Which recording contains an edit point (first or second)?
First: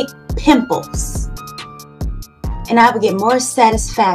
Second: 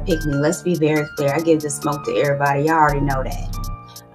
first